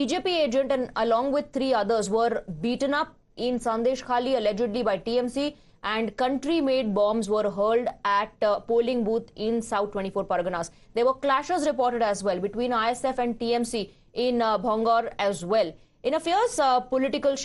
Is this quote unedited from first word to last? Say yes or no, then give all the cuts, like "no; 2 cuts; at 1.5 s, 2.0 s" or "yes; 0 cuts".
no; 1 cut; at 11.4 s